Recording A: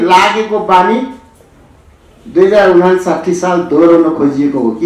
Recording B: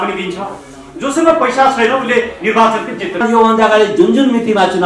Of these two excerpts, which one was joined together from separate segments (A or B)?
B